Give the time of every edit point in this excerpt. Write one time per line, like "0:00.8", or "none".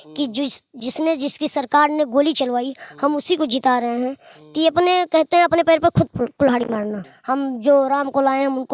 0:07.1